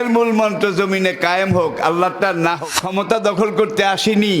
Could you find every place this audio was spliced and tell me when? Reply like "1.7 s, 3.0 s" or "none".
2.8 s

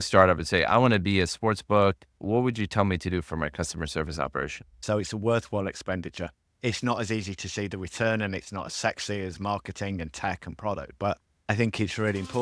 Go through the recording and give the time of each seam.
2.1 s, 4.8 s

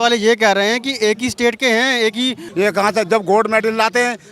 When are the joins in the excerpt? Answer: 2.4 s

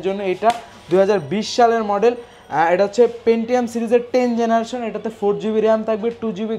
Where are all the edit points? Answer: none

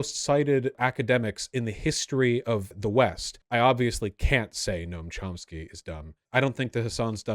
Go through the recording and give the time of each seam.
0.8 s, 2.7 s, 3.4 s, 6.2 s

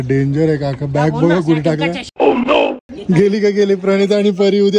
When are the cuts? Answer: none

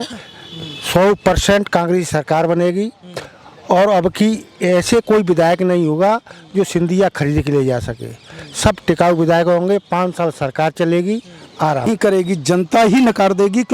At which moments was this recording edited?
11.9 s

